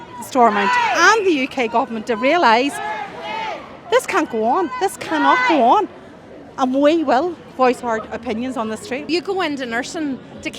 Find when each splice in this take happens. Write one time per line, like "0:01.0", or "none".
0:09.0